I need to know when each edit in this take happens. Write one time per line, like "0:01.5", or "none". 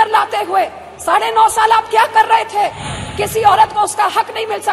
0:02.9